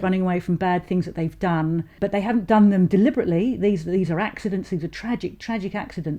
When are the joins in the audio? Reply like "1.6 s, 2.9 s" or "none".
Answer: 2.0 s